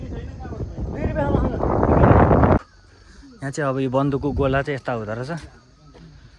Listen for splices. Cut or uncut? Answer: cut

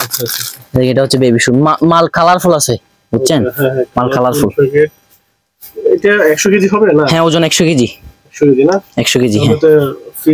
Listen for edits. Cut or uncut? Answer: uncut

